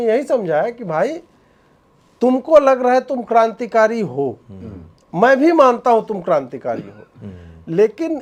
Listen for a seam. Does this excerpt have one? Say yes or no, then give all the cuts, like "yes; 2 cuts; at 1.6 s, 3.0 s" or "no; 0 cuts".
no; 0 cuts